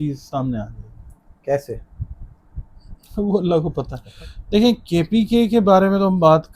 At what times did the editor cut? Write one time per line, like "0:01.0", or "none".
0:04.0